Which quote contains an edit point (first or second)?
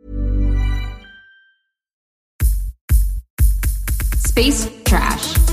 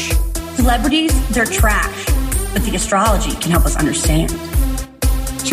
first